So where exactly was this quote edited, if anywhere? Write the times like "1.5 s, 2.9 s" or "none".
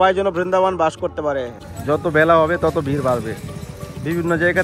1.5 s